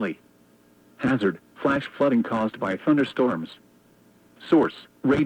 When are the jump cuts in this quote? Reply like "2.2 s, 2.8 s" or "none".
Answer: 1.8 s